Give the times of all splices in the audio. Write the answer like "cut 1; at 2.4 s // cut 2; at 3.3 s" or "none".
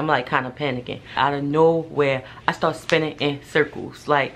cut 1; at 1.1 s